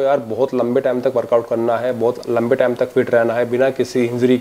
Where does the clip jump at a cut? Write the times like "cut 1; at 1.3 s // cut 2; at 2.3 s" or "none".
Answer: none